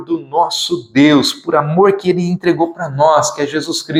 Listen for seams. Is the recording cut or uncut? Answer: uncut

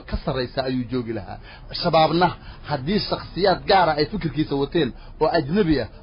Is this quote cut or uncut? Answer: uncut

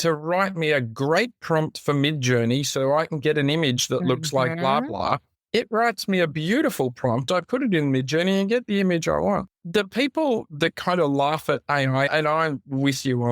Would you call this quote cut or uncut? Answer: cut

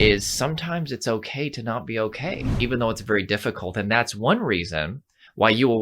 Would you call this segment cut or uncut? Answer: cut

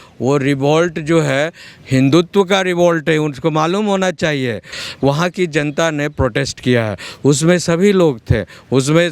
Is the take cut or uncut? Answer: cut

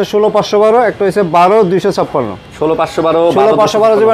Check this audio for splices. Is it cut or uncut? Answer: uncut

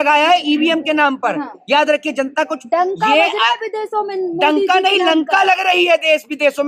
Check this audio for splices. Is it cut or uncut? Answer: uncut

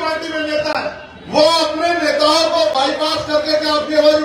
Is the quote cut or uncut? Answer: cut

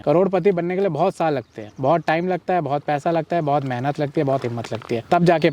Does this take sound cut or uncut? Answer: uncut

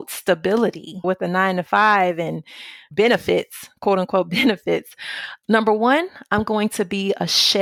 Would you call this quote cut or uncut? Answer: uncut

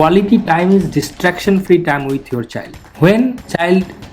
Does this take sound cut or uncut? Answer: cut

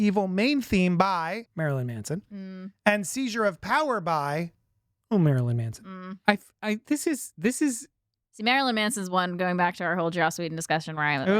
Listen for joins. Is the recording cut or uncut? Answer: cut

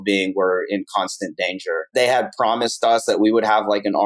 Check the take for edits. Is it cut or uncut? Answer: cut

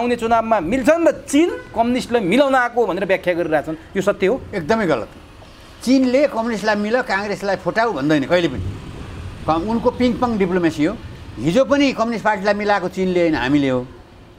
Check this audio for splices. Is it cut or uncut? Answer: uncut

